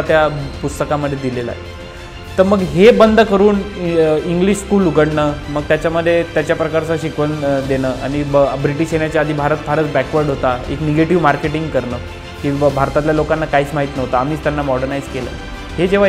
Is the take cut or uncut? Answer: uncut